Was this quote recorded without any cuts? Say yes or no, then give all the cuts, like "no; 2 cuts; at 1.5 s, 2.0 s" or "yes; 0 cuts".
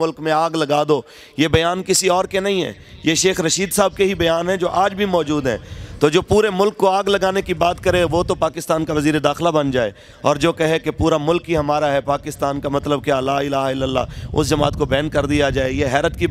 yes; 0 cuts